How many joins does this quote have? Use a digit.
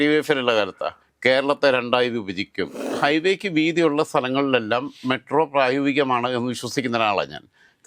1